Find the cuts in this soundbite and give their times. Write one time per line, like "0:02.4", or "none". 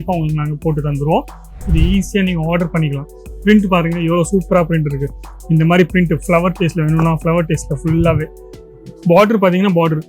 0:01.7